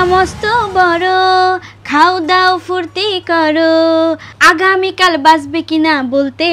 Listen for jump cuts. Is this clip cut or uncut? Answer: uncut